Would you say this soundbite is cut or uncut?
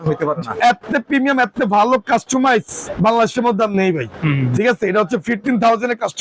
uncut